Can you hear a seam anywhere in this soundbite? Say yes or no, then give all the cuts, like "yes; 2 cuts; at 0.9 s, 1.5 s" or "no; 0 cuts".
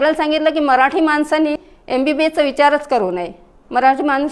yes; 1 cut; at 1.7 s